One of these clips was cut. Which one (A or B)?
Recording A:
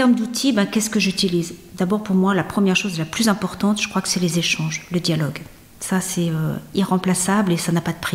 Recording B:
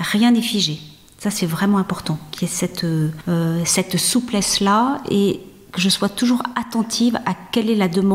B